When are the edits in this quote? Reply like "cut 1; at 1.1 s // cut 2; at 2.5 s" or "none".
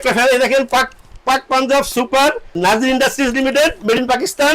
cut 1; at 2.6 s